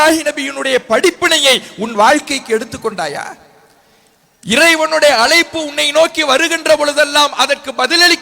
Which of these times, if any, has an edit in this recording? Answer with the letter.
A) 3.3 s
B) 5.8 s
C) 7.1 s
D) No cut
D